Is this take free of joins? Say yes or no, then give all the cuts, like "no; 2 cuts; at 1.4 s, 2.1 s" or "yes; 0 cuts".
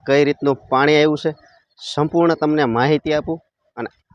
yes; 0 cuts